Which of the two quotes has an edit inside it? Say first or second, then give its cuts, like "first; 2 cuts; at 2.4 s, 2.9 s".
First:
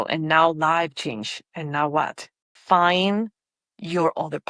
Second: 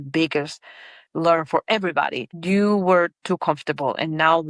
first; 1 cut; at 2.5 s